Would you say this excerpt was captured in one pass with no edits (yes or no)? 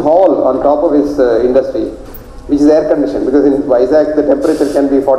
yes